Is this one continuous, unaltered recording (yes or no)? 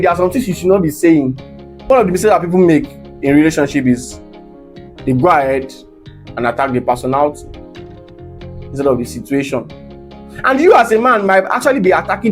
no